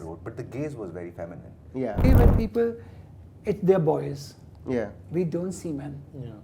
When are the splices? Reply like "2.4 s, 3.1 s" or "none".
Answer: 2.0 s